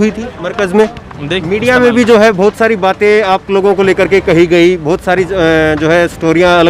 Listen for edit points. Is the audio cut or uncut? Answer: cut